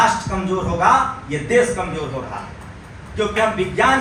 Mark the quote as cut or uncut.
uncut